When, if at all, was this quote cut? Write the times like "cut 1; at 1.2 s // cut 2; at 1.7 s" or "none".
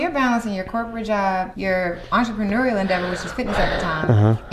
cut 1; at 1.5 s